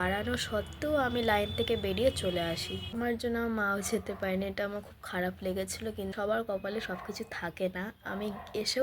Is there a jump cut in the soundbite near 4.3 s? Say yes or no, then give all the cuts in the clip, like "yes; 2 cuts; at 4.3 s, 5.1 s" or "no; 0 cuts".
no; 2 cuts; at 2.9 s, 6.1 s